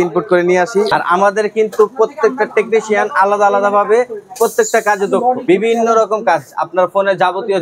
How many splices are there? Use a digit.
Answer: 2